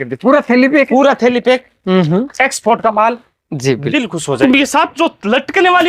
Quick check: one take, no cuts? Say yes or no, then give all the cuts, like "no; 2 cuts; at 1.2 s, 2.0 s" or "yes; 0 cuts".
no; 1 cut; at 4.4 s